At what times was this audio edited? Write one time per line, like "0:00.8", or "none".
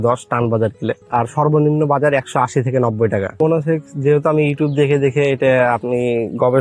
0:01.0
0:03.3